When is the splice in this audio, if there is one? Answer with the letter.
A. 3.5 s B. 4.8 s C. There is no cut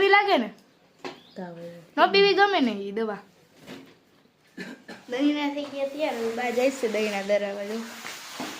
B